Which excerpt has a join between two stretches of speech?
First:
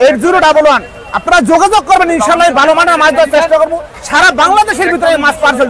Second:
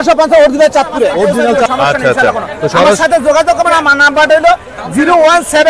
second; 1 cut; at 1.6 s

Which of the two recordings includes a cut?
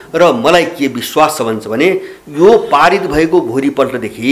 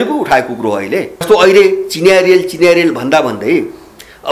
second; 1 cut; at 1.2 s

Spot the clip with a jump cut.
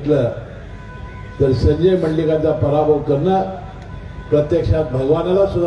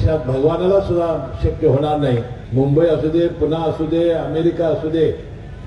second; 1 cut; at 2.4 s

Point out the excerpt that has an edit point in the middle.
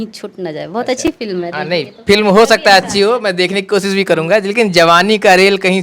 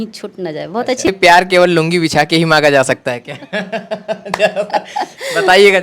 second; 1 cut; at 1.1 s

